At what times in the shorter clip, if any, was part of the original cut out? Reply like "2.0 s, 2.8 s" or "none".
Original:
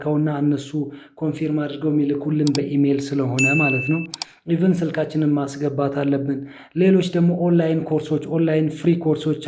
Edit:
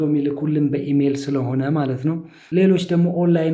2.3 s